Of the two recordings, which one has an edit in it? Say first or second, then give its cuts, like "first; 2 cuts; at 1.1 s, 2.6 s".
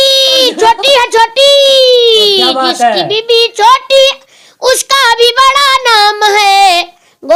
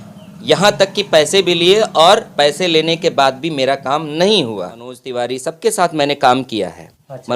second; 1 cut; at 5.0 s